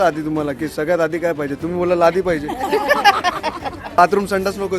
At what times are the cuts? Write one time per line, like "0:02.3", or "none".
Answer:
0:03.9